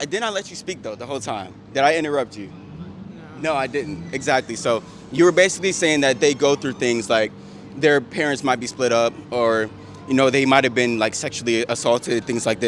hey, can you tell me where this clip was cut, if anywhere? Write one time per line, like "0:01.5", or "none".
none

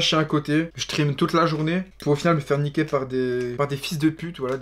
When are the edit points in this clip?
none

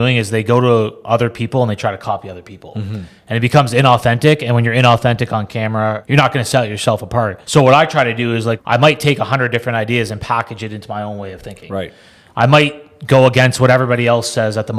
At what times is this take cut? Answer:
0:06.0
0:07.4
0:08.6

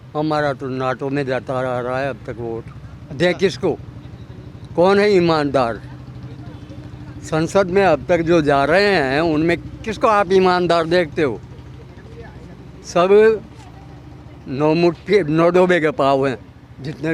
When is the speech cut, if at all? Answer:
none

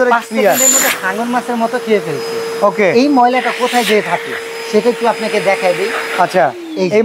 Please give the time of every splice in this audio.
none

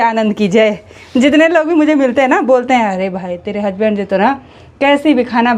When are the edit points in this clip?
none

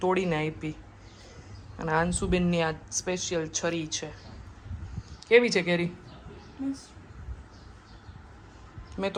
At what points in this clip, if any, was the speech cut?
none

